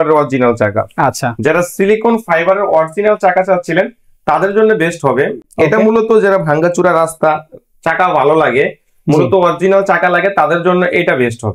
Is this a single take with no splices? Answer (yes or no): yes